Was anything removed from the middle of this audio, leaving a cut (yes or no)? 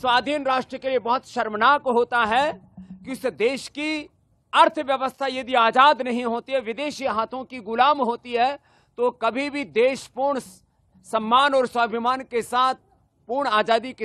no